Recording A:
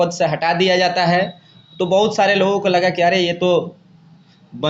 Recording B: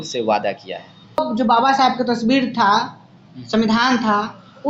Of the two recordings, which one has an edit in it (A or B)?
B